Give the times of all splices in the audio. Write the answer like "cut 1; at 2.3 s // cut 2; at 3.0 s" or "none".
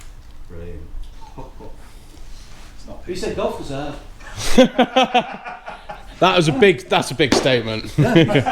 cut 1; at 1.1 s